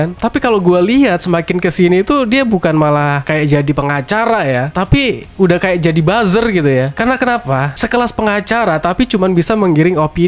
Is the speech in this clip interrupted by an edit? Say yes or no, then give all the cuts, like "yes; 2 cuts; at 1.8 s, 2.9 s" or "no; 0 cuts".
no; 0 cuts